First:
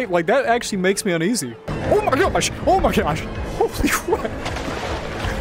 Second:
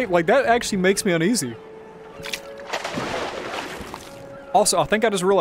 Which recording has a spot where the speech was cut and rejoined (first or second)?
first